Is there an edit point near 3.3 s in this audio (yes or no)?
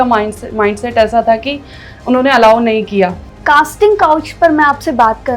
yes